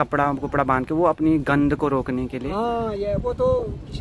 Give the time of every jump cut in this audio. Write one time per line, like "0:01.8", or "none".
none

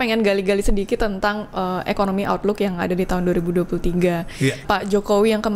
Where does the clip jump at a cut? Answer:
0:04.6

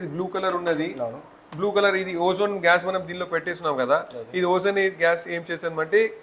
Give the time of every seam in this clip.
none

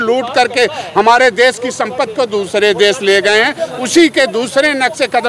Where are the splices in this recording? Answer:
none

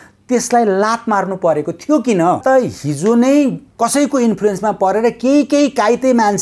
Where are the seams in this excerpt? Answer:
0:02.4
0:03.6

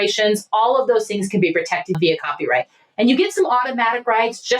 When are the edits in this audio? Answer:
0:02.0

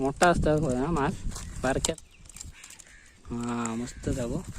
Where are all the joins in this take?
0:01.9

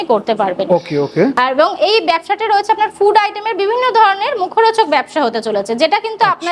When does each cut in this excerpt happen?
none

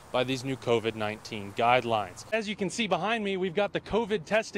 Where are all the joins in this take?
0:02.3

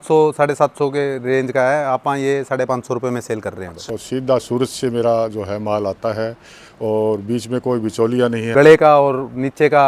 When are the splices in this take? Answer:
0:03.8
0:08.4

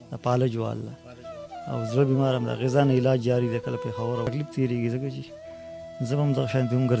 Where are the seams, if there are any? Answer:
0:04.3

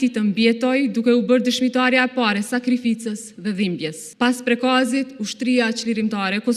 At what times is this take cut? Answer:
0:04.0

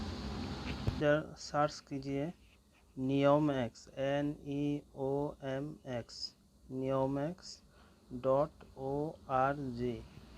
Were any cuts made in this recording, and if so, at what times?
0:01.0

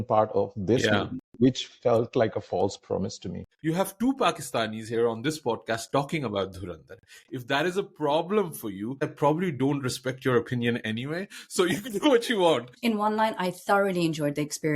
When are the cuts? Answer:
0:03.4
0:09.0
0:12.7

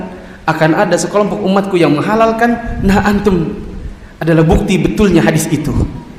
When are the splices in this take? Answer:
none

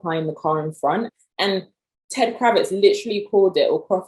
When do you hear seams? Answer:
0:01.1

